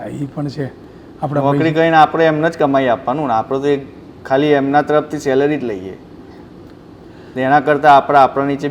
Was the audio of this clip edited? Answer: no; 0 cuts

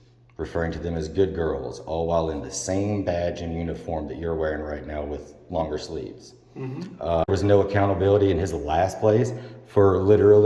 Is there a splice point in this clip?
yes; 1 cut; at 7.3 s

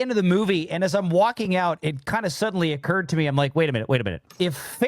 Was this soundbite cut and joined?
no; 0 cuts

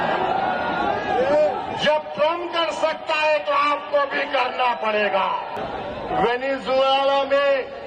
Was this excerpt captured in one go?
no; 1 cut; at 5.5 s

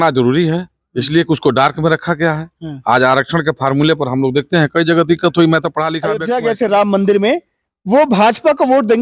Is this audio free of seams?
no; 1 cut; at 6.0 s

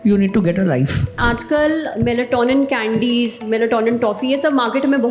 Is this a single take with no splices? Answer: no; 1 cut; at 1.2 s

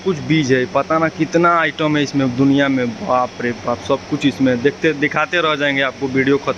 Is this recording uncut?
yes; 0 cuts

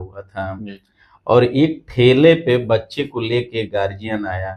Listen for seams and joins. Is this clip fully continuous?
yes; 0 cuts

